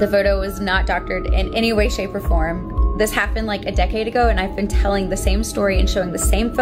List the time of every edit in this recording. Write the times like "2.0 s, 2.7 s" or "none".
none